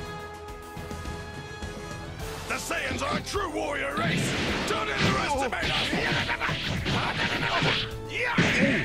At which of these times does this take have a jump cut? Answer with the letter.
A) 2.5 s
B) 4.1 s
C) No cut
A